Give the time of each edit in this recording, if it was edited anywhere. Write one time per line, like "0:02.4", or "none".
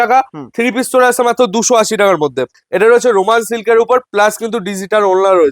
0:02.6